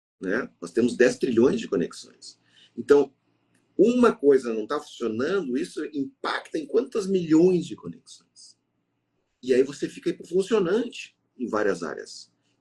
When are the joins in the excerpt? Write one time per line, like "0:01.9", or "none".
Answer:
none